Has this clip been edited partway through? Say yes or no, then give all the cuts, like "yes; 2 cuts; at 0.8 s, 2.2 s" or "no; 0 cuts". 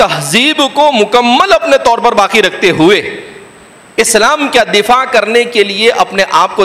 no; 0 cuts